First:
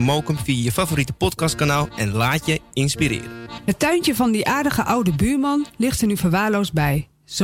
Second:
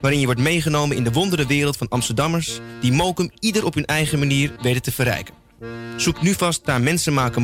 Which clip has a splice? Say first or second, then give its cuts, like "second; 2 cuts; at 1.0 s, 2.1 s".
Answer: first; 1 cut; at 3.5 s